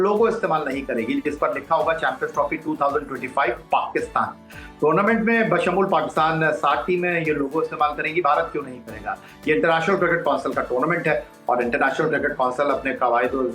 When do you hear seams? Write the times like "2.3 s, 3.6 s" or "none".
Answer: none